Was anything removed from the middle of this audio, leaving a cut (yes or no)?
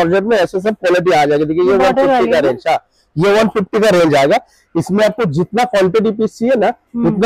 no